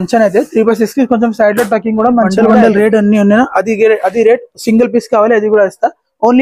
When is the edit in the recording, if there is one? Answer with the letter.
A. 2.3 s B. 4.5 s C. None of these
A